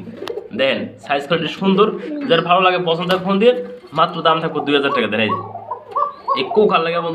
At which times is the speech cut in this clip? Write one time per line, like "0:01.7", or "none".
none